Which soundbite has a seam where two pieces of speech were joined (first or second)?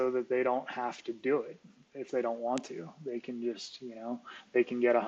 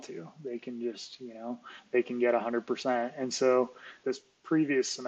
second